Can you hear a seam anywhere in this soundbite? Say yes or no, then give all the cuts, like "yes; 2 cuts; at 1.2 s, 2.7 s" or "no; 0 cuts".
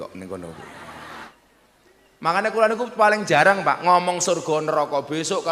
yes; 1 cut; at 1.3 s